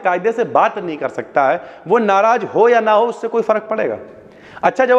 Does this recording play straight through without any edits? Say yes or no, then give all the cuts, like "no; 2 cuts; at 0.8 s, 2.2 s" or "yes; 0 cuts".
yes; 0 cuts